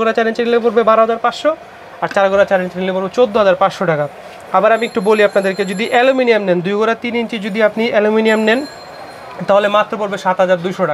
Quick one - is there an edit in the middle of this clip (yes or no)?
no